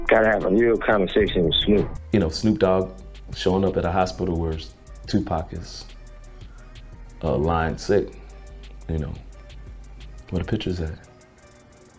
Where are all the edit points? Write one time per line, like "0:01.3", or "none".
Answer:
0:02.0